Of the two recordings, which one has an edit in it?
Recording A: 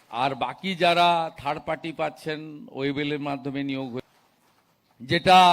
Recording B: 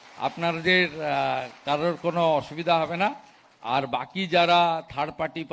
A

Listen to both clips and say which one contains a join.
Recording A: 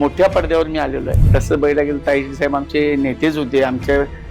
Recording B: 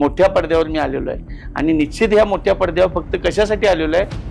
A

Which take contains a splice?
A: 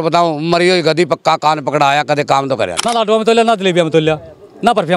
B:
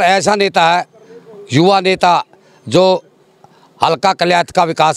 A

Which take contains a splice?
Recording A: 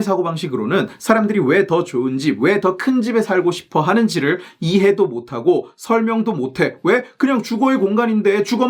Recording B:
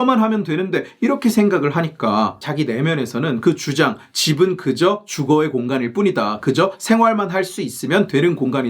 B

